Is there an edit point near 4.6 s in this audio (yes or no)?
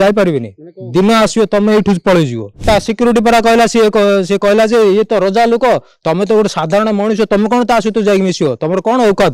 no